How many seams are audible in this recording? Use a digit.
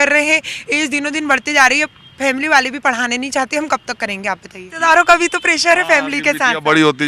1